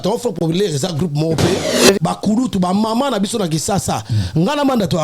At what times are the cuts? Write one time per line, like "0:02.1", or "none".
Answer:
0:01.8

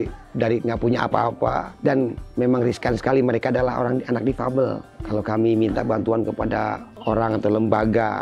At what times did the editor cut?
0:01.7
0:04.9
0:06.9

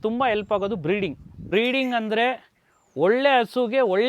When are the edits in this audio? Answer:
0:01.4

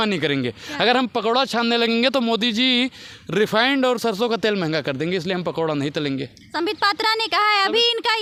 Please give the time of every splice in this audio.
none

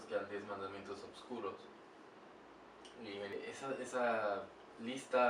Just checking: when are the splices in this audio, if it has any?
0:03.3

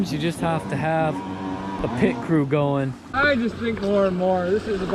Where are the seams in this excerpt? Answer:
0:03.0

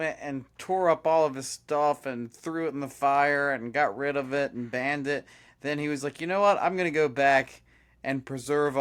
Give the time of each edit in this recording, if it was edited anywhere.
none

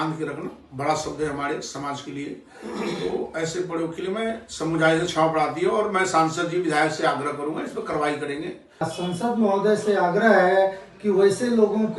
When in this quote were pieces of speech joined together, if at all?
0:08.9

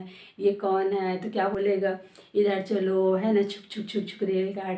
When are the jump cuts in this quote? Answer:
0:01.6

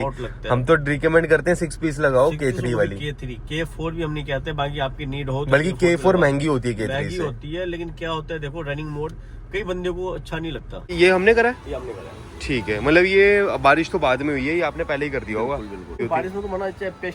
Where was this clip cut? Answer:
0:10.9
0:16.0

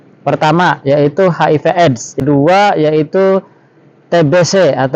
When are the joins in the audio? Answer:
0:02.2

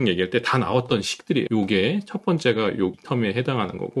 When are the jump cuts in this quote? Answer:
0:01.5
0:03.0

